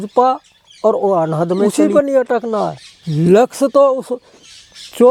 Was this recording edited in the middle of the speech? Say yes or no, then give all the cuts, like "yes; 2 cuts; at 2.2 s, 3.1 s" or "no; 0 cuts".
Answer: yes; 1 cut; at 1.7 s